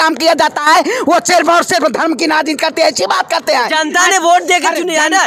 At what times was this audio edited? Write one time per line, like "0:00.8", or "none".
none